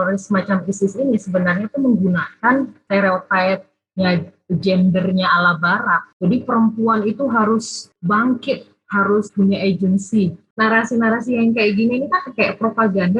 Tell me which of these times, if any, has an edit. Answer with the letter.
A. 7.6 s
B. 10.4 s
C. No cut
B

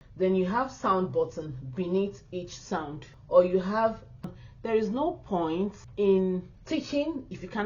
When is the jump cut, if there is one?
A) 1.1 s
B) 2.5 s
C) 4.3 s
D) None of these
C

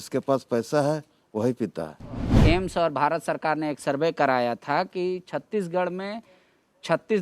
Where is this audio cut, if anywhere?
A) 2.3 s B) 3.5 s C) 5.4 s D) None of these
A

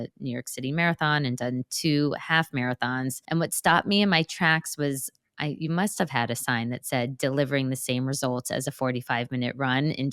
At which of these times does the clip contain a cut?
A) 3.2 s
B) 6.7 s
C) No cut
A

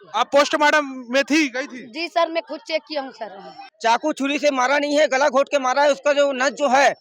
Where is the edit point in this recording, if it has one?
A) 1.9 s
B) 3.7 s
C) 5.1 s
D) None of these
B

